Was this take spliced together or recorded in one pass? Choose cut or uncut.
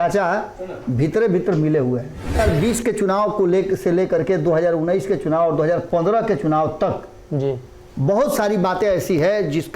cut